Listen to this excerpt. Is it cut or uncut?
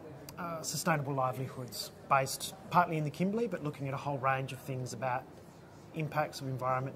cut